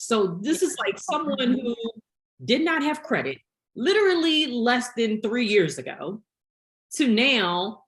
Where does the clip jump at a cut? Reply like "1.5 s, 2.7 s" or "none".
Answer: none